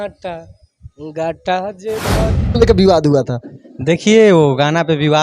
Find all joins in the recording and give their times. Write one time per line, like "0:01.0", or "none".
0:02.4